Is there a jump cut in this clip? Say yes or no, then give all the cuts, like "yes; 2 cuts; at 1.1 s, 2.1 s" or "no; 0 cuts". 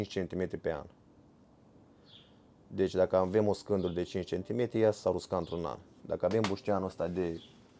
no; 0 cuts